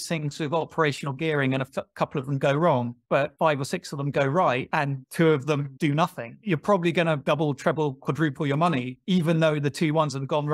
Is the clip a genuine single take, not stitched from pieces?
no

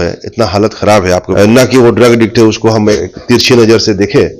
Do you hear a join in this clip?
yes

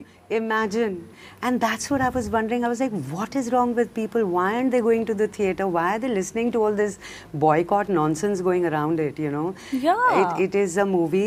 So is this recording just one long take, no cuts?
yes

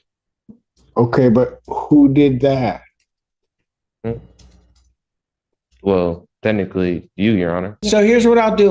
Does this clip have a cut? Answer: yes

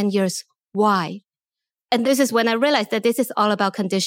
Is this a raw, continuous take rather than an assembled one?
yes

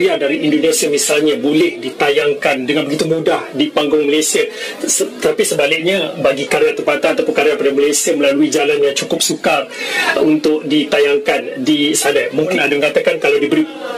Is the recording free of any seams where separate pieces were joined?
yes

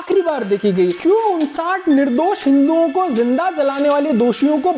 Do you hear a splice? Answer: yes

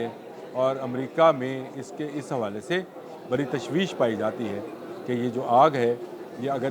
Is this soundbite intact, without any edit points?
yes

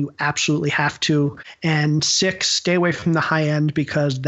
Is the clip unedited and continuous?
no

